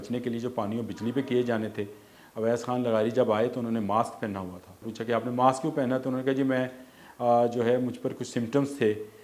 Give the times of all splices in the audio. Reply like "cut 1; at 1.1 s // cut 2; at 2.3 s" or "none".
cut 1; at 4.9 s